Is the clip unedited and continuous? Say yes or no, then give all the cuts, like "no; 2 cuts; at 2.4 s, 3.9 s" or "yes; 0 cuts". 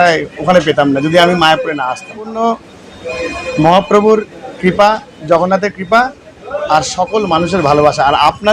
no; 1 cut; at 2.3 s